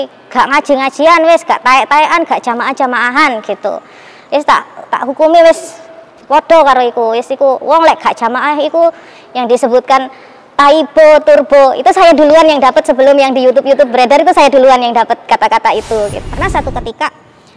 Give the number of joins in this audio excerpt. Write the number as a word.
one